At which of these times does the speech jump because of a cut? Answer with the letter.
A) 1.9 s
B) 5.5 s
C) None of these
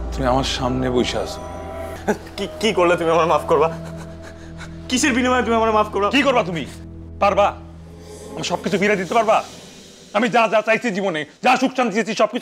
A